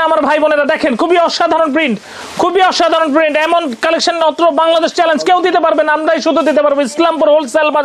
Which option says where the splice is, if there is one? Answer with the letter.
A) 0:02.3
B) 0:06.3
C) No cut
C